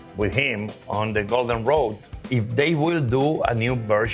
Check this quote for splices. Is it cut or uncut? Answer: uncut